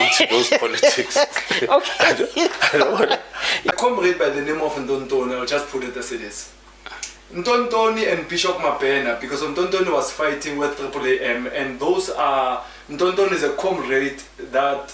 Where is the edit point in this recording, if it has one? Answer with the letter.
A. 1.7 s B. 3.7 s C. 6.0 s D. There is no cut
B